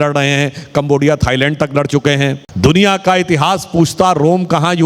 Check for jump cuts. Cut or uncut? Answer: cut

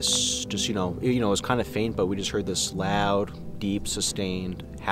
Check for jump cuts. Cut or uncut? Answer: uncut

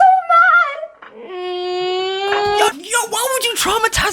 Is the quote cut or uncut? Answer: cut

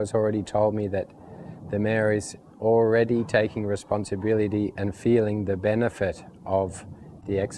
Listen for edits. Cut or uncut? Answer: uncut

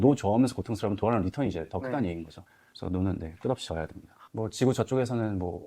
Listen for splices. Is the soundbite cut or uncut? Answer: uncut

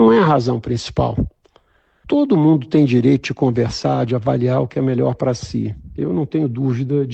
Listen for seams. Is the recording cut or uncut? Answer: cut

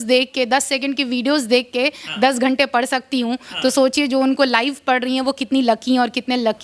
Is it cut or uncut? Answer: uncut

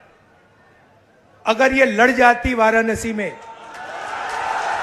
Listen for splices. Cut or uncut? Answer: uncut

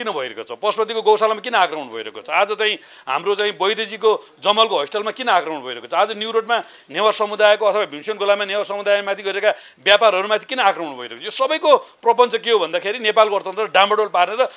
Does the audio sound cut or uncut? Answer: uncut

